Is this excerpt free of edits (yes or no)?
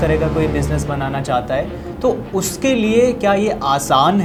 yes